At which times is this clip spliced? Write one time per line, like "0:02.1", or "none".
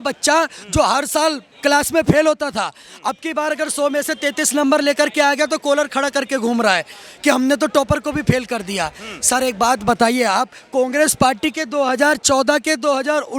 none